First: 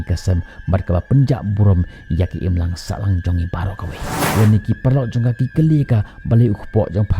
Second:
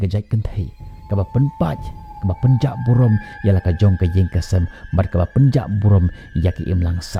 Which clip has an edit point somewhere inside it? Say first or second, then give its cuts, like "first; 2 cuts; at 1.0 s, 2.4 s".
first; 1 cut; at 4.2 s